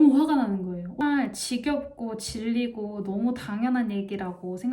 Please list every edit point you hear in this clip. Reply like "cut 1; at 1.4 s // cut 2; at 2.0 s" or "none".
cut 1; at 1.0 s